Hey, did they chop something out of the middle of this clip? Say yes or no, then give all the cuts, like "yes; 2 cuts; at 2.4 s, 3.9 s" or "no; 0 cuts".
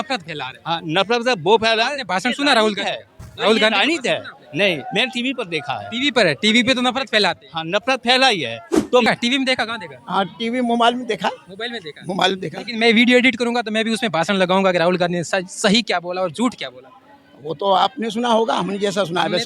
yes; 2 cuts; at 9.1 s, 18.1 s